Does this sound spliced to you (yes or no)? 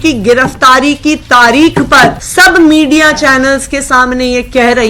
yes